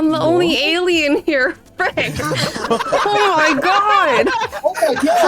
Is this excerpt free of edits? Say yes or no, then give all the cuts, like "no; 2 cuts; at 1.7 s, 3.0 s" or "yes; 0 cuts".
no; 1 cut; at 2.4 s